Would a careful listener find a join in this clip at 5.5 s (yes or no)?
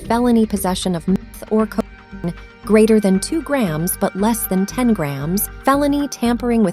yes